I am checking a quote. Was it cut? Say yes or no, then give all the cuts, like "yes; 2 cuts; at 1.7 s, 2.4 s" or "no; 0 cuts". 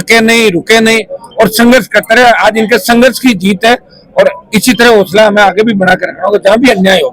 no; 0 cuts